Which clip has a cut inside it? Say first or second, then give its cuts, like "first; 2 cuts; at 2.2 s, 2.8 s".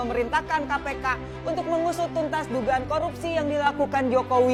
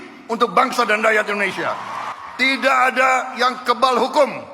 second; 1 cut; at 2.1 s